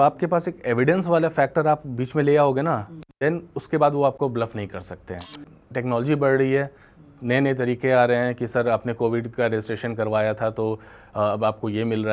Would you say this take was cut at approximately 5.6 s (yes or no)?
yes